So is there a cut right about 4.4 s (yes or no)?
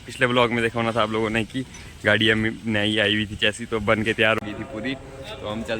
yes